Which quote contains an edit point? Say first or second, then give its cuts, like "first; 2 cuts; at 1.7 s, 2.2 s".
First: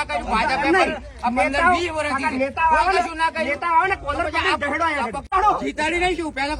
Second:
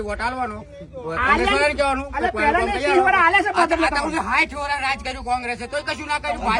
first; 1 cut; at 5.2 s